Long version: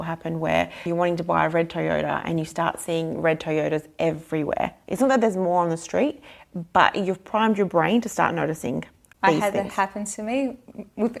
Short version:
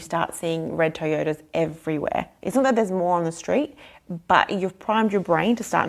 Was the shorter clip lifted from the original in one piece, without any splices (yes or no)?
yes